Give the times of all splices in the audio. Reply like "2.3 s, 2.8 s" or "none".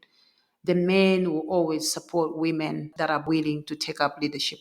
3.3 s